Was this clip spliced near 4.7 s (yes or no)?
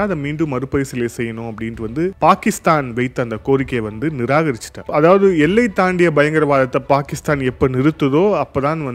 yes